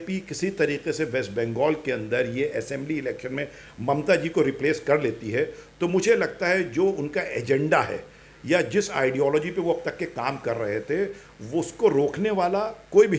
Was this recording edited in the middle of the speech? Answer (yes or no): no